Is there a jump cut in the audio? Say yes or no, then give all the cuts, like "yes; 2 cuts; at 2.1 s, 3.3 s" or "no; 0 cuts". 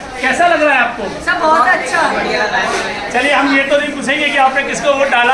no; 0 cuts